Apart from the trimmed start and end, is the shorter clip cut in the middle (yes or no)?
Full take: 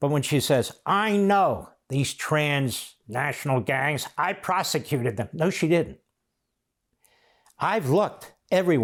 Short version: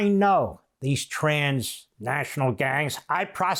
no